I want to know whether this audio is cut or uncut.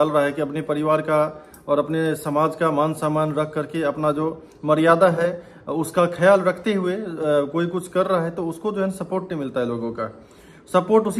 uncut